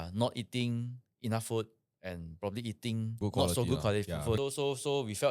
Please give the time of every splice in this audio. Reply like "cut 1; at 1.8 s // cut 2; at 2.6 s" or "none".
cut 1; at 3.2 s // cut 2; at 4.4 s